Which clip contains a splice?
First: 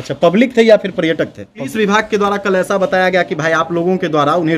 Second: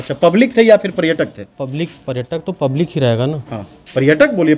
first; 1 cut; at 1.7 s

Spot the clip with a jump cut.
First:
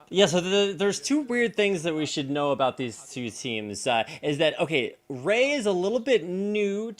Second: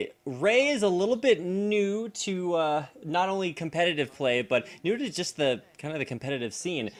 first; 1 cut; at 1.0 s

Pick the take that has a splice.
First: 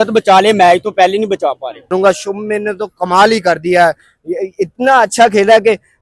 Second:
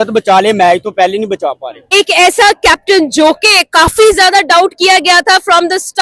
first; 1 cut; at 1.9 s

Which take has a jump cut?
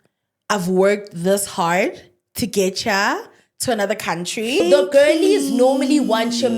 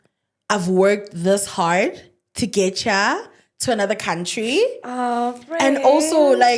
first; 1 cut; at 4.6 s

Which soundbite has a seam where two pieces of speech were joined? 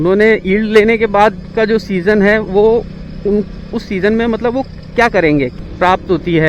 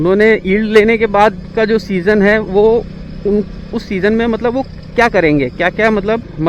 first; 1 cut; at 5.6 s

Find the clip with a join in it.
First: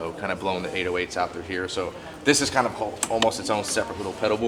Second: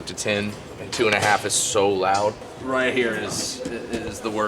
second; 1 cut; at 2.5 s

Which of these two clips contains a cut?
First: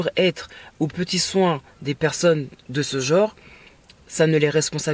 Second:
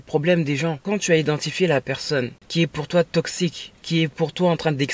second; 3 cuts; at 0.8 s, 2.4 s, 3.7 s

